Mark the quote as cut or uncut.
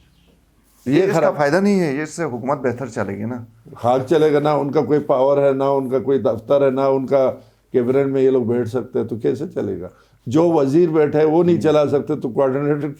uncut